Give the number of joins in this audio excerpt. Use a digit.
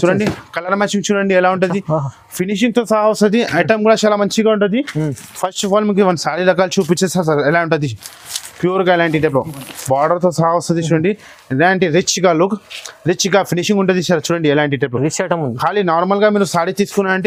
0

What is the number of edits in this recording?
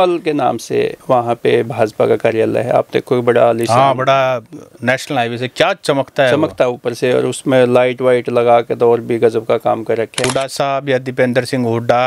1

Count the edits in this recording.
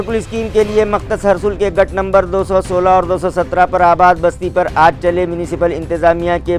0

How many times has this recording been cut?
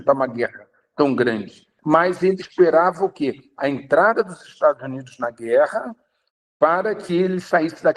1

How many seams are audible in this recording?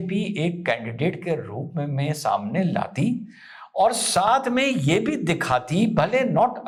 0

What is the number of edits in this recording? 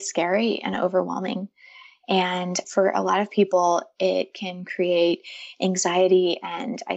1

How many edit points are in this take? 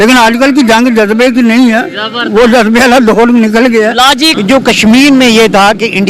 1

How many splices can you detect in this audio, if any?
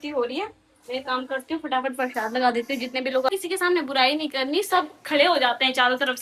1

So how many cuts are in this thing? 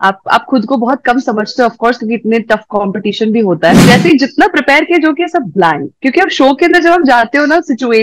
1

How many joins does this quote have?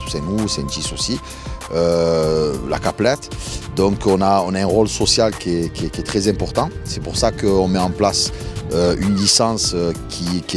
1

